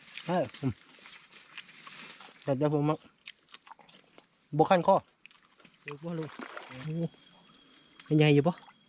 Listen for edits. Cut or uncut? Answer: cut